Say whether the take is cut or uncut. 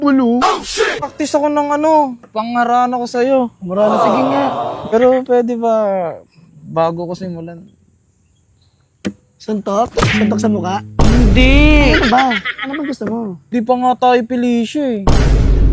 cut